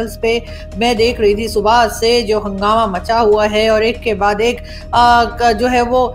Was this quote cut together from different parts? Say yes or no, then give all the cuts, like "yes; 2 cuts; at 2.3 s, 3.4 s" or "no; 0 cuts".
no; 0 cuts